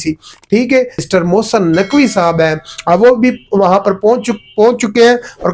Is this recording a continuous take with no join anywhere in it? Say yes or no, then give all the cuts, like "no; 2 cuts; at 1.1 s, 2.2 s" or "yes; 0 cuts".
no; 1 cut; at 1.0 s